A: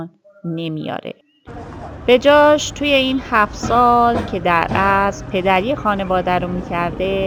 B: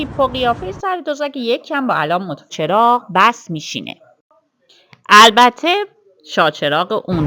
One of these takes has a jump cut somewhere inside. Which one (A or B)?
B